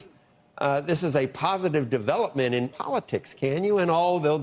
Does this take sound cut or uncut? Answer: cut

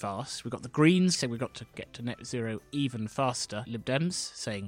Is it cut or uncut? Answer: cut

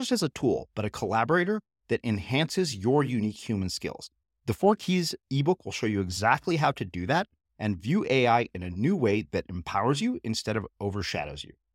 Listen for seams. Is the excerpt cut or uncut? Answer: uncut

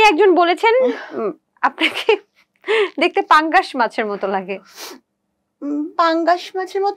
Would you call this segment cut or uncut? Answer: uncut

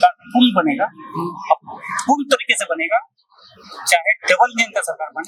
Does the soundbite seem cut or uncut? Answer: uncut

